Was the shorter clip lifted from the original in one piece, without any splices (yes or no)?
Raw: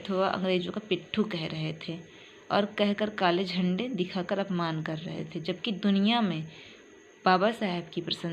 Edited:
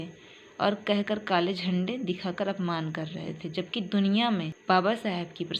no